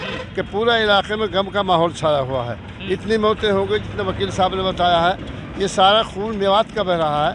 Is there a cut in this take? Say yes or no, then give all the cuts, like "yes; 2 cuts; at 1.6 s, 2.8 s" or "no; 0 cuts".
no; 0 cuts